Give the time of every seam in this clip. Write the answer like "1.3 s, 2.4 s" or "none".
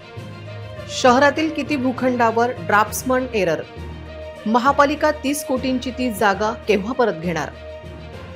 1.0 s